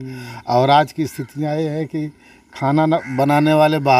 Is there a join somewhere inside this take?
no; 0 cuts

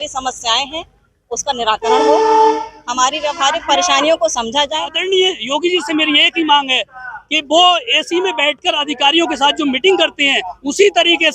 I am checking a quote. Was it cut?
yes; 1 cut; at 5.0 s

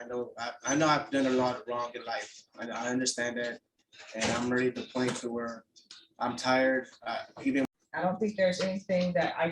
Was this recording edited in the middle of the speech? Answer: yes; 1 cut; at 7.7 s

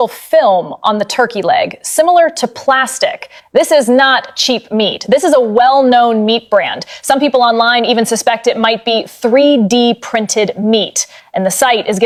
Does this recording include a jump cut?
no; 0 cuts

